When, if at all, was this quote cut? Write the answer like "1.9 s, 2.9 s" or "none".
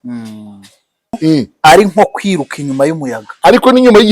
1.2 s